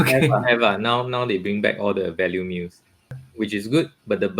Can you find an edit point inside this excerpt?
yes; 1 cut; at 3.0 s

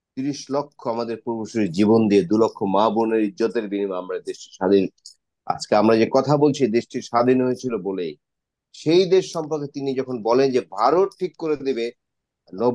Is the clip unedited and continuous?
yes; 0 cuts

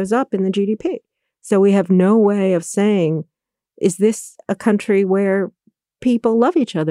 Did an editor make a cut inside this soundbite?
no; 0 cuts

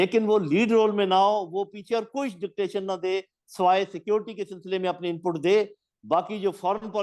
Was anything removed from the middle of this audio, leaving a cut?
no; 0 cuts

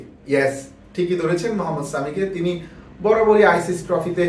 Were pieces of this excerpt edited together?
no; 0 cuts

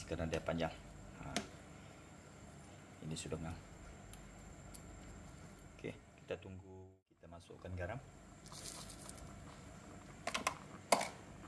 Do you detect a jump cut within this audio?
yes; 1 cut; at 6.8 s

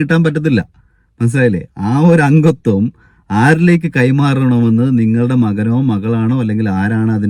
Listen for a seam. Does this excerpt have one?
no; 0 cuts

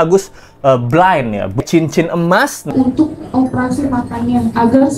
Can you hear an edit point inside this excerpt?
yes; 2 cuts; at 1.6 s, 2.7 s

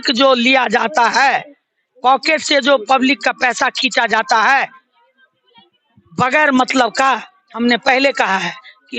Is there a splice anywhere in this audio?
no; 0 cuts

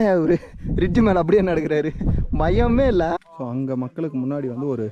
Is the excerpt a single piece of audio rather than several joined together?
no; 1 cut; at 3.2 s

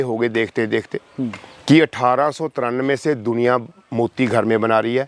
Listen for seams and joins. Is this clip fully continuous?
yes; 0 cuts

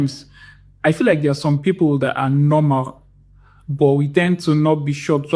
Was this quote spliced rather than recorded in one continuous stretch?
no; 0 cuts

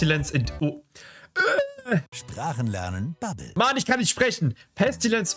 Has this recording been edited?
no; 0 cuts

